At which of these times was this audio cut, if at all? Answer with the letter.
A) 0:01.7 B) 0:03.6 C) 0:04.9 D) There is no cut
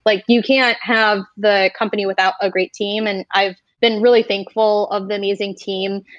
B